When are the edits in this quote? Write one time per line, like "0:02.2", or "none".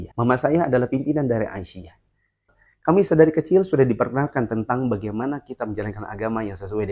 none